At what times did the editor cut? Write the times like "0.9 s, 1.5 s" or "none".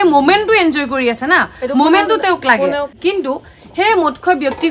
2.9 s